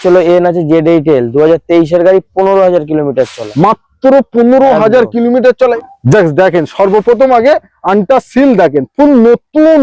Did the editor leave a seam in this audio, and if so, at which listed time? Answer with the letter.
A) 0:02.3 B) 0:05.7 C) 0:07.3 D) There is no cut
B